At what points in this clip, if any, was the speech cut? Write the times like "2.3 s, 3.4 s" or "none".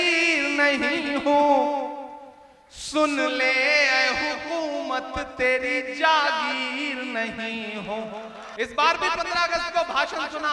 8.4 s